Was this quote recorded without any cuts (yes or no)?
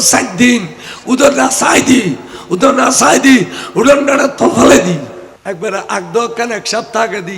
no